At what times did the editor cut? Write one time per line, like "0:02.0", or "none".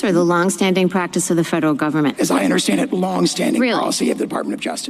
0:02.2